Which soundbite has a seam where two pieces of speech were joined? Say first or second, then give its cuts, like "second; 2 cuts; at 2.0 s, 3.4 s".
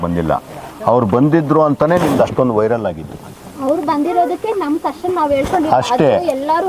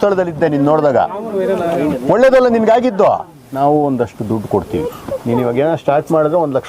second; 1 cut; at 3.4 s